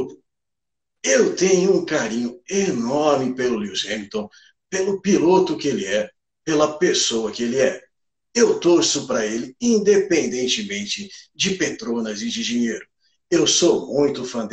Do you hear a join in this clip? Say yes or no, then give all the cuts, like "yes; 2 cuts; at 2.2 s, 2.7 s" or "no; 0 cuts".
no; 0 cuts